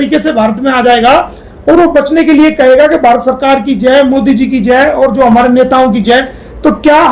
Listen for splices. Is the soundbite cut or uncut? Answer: uncut